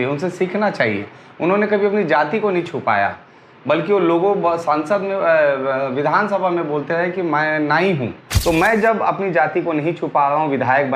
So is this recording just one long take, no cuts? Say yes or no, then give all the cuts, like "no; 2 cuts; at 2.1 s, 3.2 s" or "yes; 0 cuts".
no; 1 cut; at 8.3 s